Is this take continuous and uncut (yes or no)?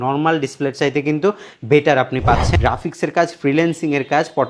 no